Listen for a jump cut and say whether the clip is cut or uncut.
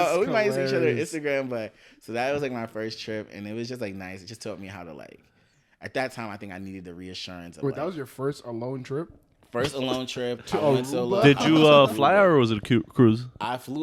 uncut